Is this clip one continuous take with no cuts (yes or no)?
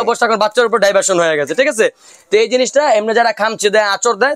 yes